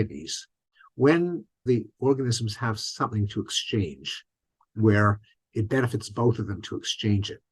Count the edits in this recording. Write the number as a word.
one